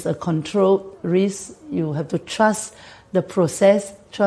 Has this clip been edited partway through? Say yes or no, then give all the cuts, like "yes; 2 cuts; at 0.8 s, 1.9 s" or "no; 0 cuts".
no; 0 cuts